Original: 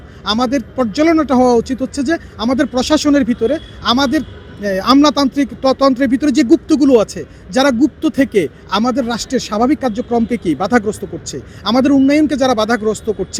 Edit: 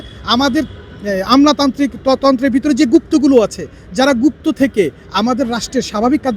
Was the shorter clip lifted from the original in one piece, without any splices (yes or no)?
yes